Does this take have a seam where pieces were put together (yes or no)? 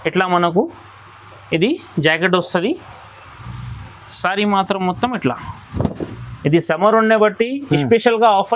no